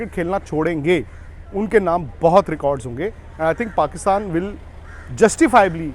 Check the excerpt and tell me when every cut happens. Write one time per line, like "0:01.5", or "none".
none